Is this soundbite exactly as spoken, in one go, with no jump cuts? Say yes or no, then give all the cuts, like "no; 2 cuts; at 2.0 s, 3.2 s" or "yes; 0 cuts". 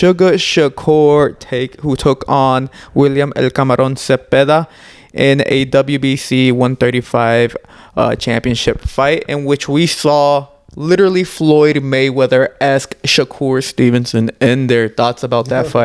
yes; 0 cuts